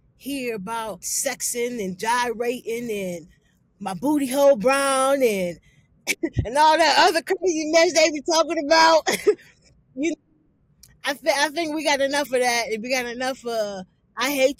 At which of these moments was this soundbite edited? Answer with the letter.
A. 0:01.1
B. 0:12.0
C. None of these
A